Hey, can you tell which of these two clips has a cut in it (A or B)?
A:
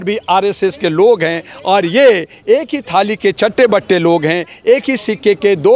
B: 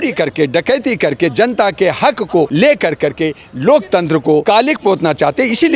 B